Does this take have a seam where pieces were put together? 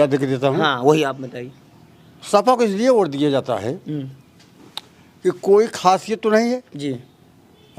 no; 0 cuts

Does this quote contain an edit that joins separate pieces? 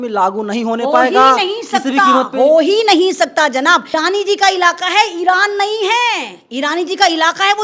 yes; 1 cut; at 3.9 s

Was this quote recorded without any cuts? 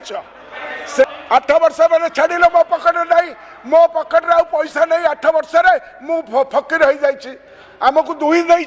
no; 1 cut; at 1.0 s

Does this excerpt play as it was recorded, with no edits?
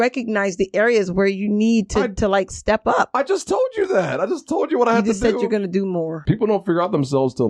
no; 1 cut; at 6.2 s

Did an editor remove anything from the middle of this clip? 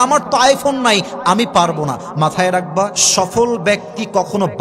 yes; 1 cut; at 3.0 s

